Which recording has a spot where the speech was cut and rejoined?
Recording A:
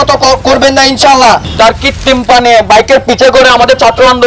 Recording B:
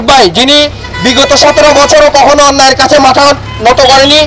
A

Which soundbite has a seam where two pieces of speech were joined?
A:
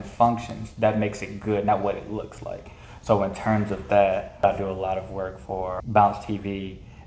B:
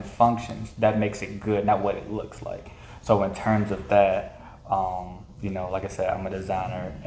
A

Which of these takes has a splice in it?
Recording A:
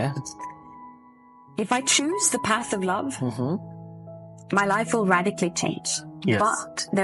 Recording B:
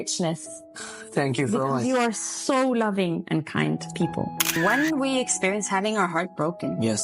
B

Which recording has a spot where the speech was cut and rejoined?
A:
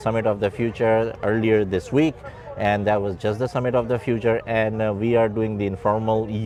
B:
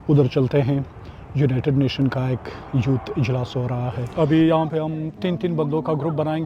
B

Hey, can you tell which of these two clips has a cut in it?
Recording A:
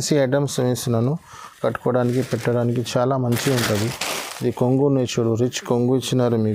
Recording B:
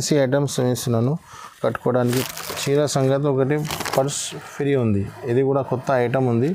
B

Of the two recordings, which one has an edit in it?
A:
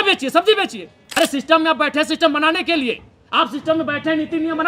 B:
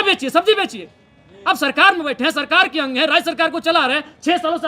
A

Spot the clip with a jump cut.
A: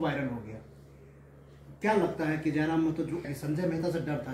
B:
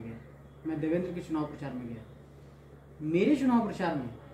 A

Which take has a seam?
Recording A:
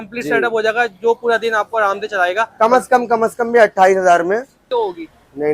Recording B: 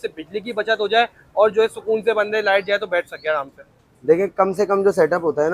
A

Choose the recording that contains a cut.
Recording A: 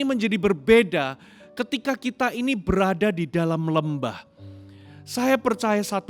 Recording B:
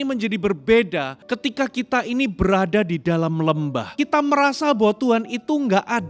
B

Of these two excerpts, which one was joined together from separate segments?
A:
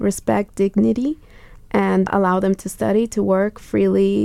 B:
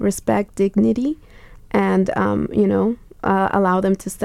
A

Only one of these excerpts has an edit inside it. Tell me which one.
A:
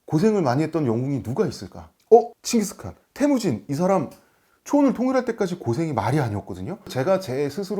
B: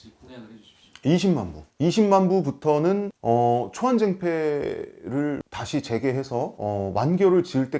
A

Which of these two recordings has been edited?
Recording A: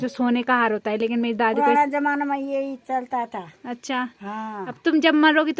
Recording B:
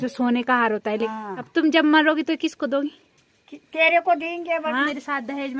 B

